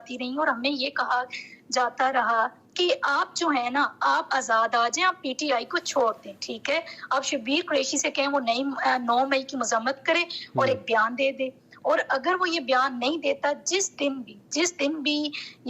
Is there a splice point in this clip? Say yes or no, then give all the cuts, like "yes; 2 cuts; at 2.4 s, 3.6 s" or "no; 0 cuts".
no; 0 cuts